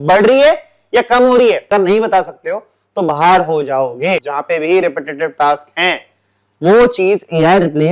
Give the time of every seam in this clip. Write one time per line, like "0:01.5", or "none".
0:01.6
0:04.3